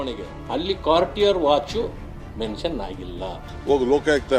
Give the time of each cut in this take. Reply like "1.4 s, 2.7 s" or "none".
3.4 s